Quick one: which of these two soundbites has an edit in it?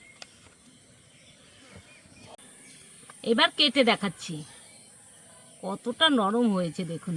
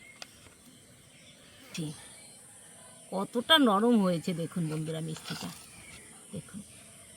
second; 1 cut; at 1.7 s

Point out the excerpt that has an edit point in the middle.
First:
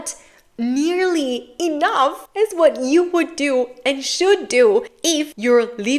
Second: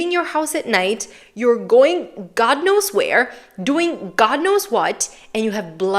first; 3 cuts; at 1.5 s, 2.2 s, 5.1 s

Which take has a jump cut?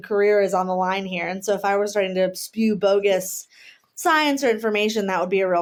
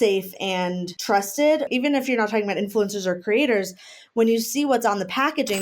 second; 2 cuts; at 0.9 s, 1.7 s

